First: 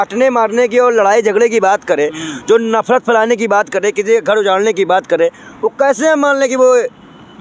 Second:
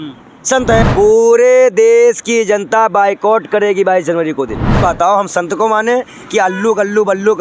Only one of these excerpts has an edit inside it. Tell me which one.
second; 2 cuts; at 0.9 s, 4.8 s

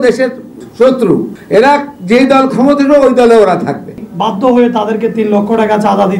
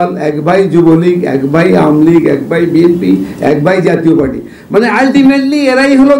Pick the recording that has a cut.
first; 1 cut; at 4.1 s

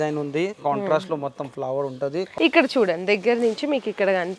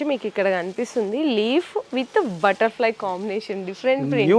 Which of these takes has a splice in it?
first; 1 cut; at 2.3 s

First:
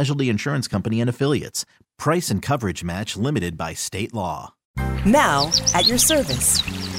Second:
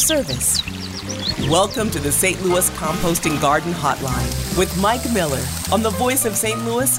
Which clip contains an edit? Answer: first; 1 cut; at 4.9 s

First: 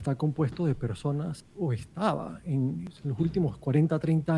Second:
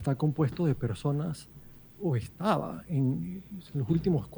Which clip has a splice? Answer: first; 2 cuts; at 1.4 s, 2.9 s

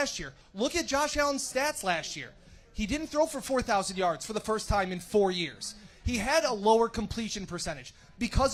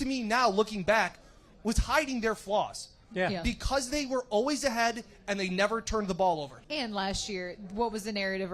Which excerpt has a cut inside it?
second; 2 cuts; at 1.5 s, 6.6 s

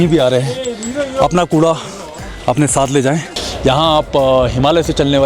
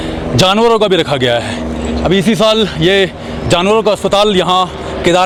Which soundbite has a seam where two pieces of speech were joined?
first; 1 cut; at 3.3 s

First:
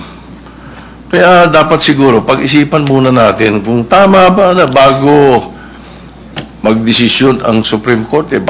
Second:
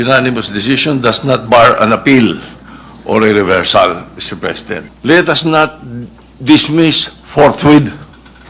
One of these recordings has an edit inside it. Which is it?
second; 1 cut; at 4.7 s

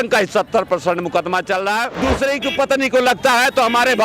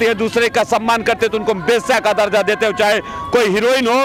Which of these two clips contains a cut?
first; 1 cut; at 1.9 s

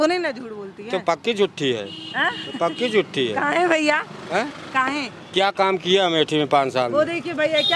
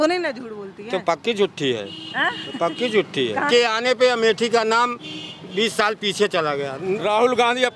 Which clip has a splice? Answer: second; 2 cuts; at 3.5 s, 7.0 s

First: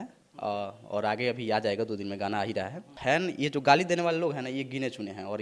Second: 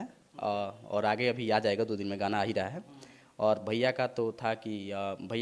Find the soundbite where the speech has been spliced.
first; 1 cut; at 2.9 s

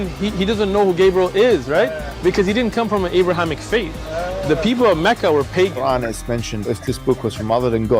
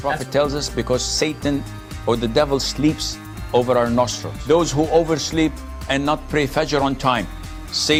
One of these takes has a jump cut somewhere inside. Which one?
first; 1 cut; at 6.7 s

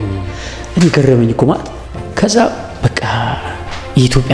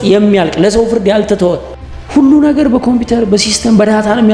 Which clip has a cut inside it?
second; 1 cut; at 1.7 s

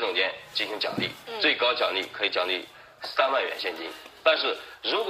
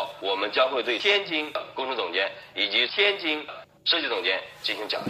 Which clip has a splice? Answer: first; 1 cut; at 2.5 s

